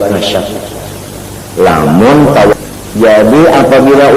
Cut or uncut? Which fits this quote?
cut